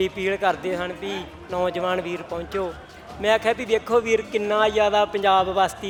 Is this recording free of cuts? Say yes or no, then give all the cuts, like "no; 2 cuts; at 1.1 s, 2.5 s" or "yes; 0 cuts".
yes; 0 cuts